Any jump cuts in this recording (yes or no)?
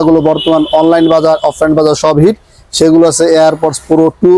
no